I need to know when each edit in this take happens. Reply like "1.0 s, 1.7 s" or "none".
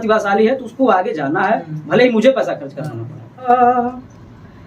3.5 s